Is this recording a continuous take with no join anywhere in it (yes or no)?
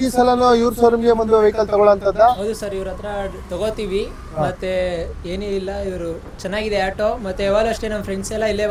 yes